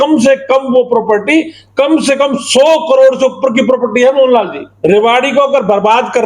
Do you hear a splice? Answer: yes; 1 cut; at 4.6 s

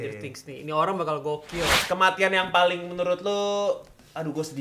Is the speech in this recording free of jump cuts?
no; 1 cut; at 1.8 s

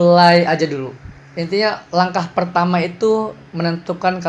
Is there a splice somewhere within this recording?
no; 0 cuts

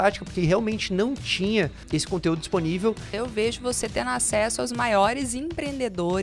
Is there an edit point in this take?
yes; 1 cut; at 3.1 s

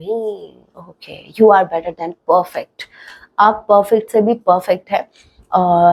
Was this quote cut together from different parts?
no; 0 cuts

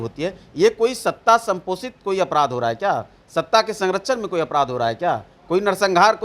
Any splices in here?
no; 0 cuts

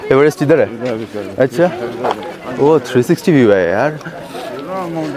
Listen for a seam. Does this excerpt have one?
no; 0 cuts

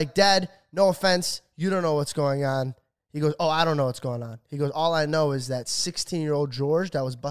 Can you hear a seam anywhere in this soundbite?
no; 0 cuts

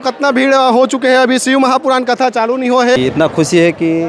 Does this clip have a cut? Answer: yes; 1 cut; at 3.0 s

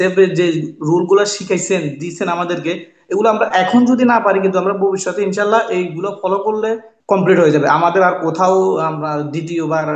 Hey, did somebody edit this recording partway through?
yes; 1 cut; at 6.9 s

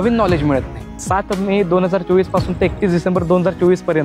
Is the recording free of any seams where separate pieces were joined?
no; 1 cut; at 1.0 s

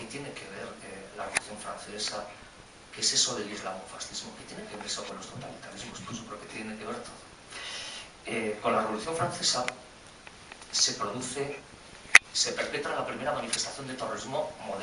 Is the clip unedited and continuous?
yes; 0 cuts

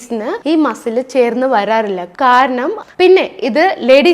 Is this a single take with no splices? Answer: no; 1 cut; at 2.8 s

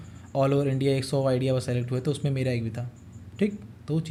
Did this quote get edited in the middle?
no; 0 cuts

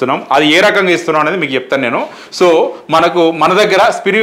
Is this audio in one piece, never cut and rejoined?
yes; 0 cuts

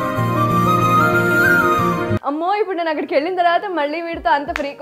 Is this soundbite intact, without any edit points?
no; 1 cut; at 2.2 s

